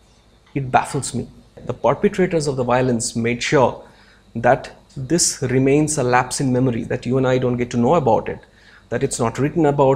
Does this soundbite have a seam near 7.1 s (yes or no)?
no